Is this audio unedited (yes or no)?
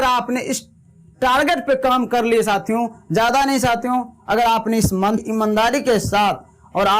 no